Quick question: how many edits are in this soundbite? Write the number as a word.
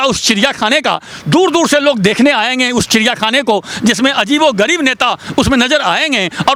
zero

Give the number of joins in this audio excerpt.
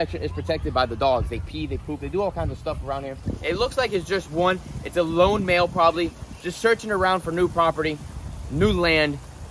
one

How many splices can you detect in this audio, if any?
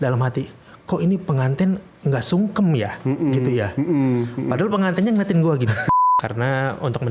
one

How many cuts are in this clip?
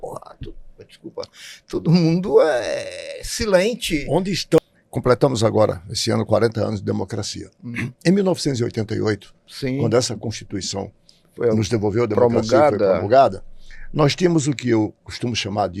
one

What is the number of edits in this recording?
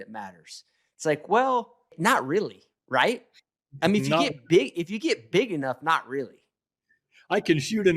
one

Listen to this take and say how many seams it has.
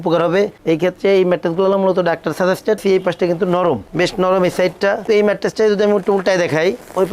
two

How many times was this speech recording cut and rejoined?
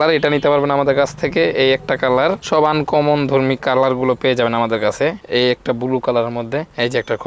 one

